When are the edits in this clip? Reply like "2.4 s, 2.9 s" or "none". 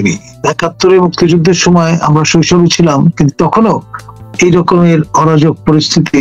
none